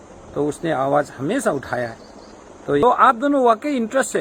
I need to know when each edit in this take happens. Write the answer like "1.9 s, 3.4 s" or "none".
2.8 s